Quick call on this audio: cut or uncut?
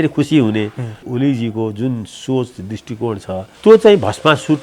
cut